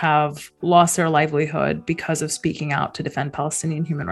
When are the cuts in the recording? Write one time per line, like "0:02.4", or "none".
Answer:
none

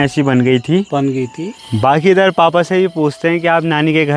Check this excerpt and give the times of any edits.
0:01.7

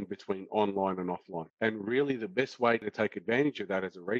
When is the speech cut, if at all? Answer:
0:01.4

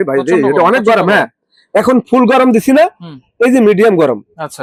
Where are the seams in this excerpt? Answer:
none

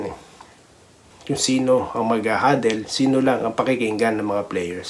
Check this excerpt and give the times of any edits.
0:01.1

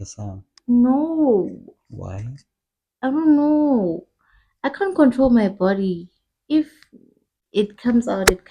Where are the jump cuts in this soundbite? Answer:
none

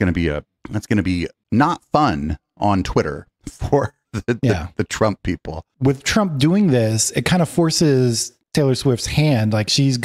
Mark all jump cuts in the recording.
0:05.6

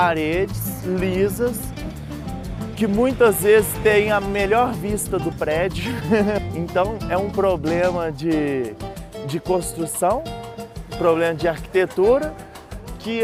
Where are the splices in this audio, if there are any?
none

